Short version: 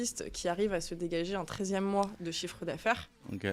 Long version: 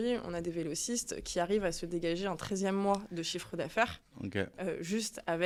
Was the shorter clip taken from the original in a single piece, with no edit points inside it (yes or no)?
yes